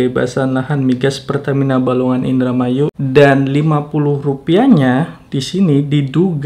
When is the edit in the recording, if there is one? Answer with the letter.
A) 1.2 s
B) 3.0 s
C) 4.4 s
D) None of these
B